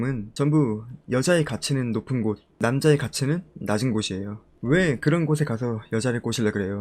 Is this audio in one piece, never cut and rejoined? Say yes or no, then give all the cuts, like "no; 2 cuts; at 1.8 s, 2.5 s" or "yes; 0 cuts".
yes; 0 cuts